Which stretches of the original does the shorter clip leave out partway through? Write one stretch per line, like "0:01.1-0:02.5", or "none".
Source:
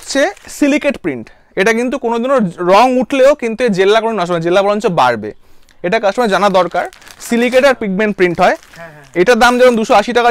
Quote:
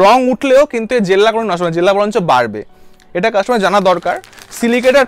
none